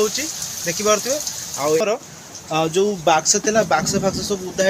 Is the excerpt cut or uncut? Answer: cut